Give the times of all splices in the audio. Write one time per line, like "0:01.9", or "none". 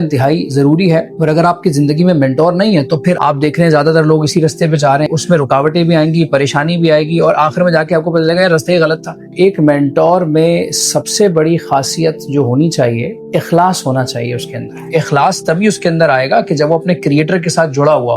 0:01.1
0:03.2
0:05.1
0:09.3
0:13.2
0:14.8